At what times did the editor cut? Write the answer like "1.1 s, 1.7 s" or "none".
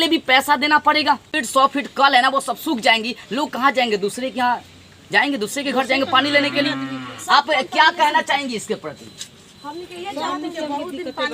1.3 s